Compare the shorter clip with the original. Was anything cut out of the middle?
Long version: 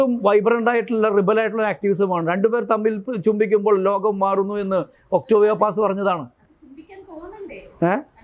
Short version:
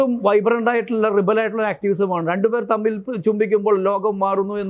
no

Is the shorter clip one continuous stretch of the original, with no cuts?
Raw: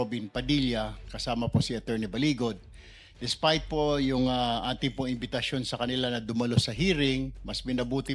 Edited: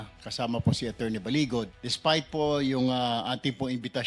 no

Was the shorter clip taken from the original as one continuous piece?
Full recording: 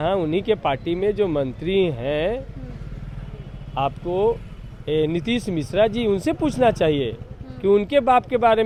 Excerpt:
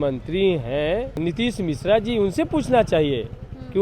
no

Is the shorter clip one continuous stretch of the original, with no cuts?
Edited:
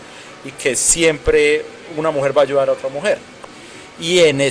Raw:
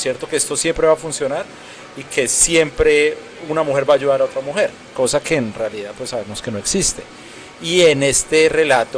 no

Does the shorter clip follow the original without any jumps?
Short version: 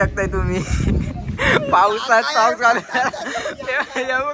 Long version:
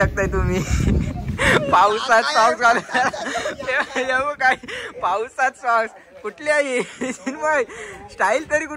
yes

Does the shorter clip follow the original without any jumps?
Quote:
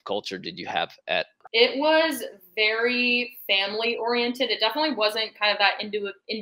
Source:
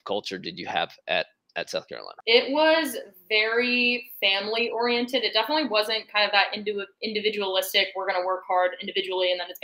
no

